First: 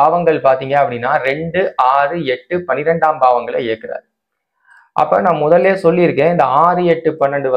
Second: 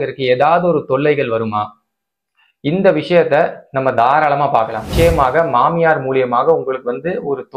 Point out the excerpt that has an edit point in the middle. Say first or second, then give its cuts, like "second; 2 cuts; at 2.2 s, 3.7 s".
second; 1 cut; at 4.9 s